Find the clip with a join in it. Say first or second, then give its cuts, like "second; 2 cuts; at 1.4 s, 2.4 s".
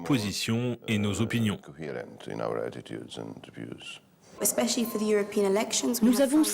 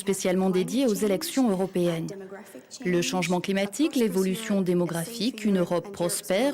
first; 1 cut; at 4.3 s